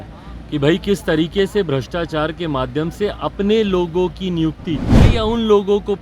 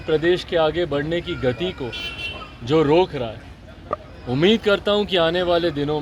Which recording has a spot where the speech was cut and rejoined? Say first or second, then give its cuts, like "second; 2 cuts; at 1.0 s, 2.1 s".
first; 1 cut; at 5.0 s